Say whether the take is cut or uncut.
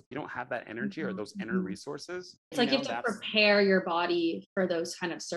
cut